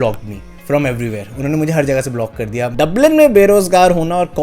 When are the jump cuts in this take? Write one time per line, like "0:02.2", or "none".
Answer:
0:02.7